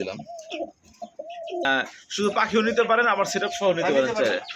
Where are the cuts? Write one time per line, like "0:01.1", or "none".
0:01.7